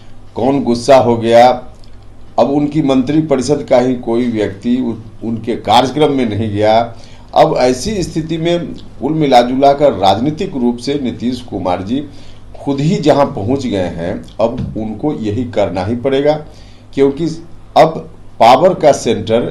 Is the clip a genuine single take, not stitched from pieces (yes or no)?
yes